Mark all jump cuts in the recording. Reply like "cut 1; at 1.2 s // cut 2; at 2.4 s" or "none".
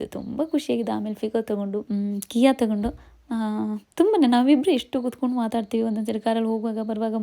cut 1; at 1.8 s